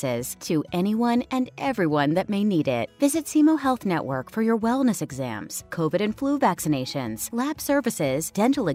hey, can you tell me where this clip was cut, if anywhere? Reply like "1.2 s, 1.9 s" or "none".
none